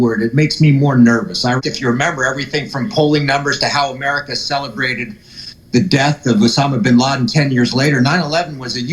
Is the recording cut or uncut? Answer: cut